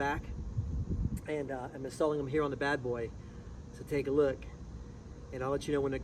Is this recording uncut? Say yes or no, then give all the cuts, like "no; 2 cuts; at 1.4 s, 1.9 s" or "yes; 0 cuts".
yes; 0 cuts